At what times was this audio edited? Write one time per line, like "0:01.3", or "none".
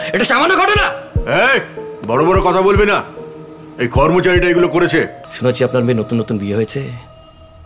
0:05.2